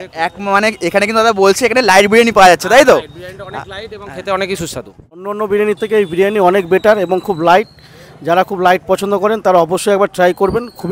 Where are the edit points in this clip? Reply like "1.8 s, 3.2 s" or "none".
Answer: 5.3 s